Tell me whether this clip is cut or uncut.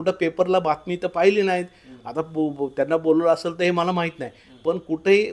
uncut